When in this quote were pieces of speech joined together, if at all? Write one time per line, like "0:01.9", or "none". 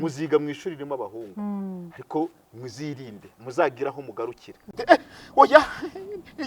0:04.7